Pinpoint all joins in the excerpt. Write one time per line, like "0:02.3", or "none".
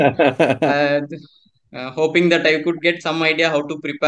none